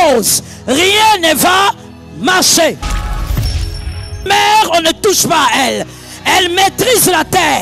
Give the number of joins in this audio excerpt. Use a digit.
0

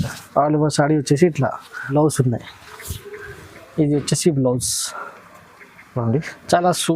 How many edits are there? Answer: 1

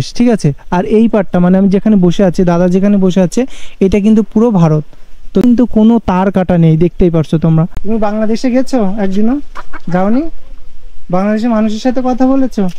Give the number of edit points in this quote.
2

